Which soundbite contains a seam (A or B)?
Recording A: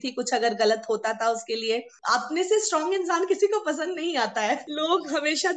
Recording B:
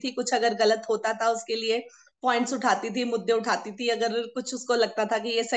A